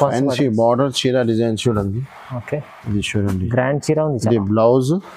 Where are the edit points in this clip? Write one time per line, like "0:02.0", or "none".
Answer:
0:02.8

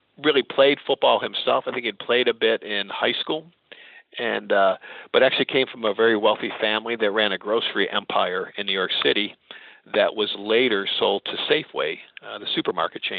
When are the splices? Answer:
none

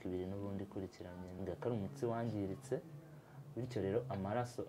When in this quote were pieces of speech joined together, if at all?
0:01.3

